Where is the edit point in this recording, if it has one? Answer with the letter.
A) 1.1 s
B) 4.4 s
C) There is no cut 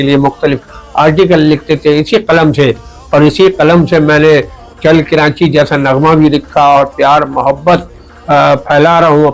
C